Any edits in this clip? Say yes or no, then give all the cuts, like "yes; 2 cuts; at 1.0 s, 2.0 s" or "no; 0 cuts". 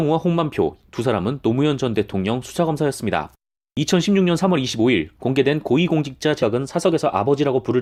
no; 0 cuts